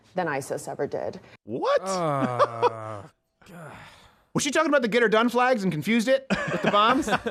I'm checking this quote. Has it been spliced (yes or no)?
no